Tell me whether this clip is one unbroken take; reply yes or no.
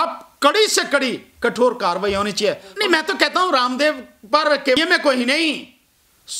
no